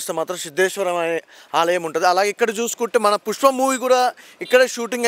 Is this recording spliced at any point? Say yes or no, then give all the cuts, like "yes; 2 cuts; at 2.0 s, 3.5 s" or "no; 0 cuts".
no; 0 cuts